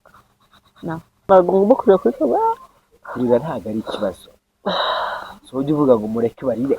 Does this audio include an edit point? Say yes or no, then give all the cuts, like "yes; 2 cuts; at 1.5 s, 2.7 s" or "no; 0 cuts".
yes; 1 cut; at 1.1 s